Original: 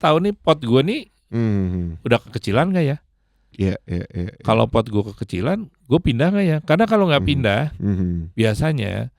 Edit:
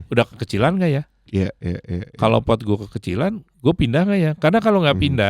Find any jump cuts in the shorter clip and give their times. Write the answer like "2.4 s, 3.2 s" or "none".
1.2 s